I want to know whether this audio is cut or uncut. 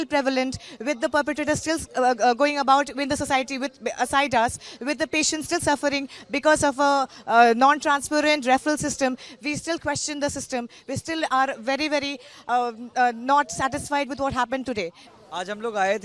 uncut